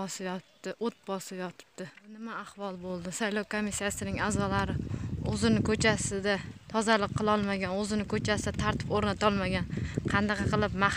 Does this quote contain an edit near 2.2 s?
yes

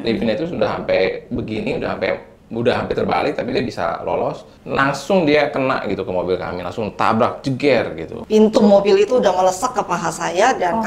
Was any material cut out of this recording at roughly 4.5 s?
yes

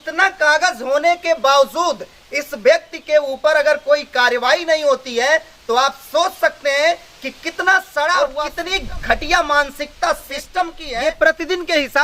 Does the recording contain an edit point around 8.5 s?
yes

